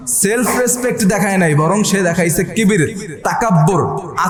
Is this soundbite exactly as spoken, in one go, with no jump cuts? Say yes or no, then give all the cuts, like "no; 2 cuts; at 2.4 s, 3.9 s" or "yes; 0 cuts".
yes; 0 cuts